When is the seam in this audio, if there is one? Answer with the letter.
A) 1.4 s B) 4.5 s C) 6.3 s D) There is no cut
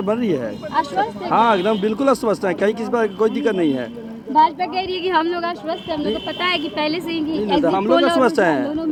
D